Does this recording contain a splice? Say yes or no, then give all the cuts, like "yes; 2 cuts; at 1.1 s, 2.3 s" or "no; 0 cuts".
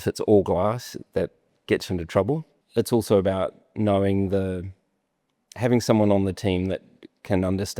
yes; 1 cut; at 2.6 s